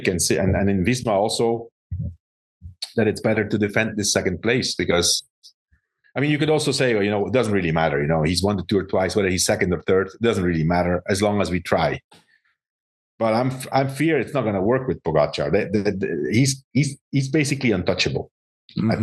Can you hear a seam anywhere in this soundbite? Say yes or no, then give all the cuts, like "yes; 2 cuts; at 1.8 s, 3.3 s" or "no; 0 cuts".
no; 0 cuts